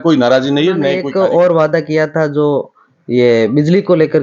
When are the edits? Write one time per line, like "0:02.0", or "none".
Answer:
0:01.0

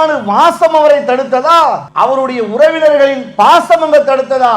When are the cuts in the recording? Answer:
0:01.9

